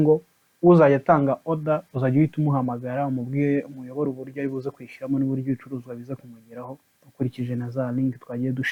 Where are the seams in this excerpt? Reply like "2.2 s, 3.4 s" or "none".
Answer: none